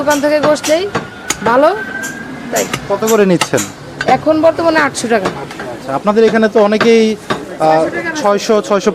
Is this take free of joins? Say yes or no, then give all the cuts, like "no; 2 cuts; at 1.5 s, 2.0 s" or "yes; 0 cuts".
yes; 0 cuts